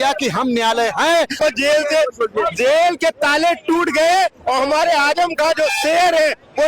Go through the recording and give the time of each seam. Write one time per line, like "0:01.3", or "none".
0:01.3